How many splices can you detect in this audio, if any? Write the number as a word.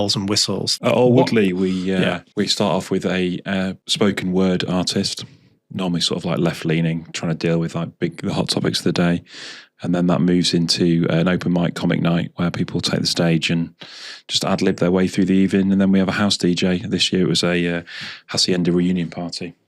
three